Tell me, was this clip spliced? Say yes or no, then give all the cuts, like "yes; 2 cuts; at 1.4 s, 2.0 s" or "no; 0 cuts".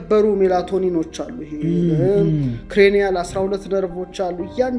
no; 0 cuts